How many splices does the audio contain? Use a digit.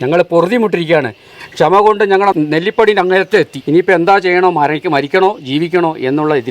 2